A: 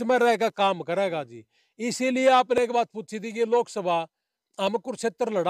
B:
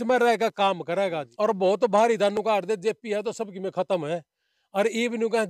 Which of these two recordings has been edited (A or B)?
B